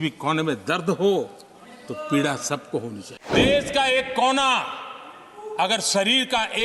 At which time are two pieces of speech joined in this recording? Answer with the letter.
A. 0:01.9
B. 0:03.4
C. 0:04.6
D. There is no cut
B